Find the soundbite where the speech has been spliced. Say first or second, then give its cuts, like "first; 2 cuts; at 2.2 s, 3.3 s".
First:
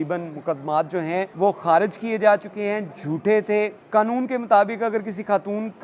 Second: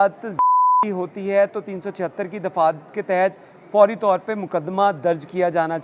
first; 2 cuts; at 1.3 s, 3.8 s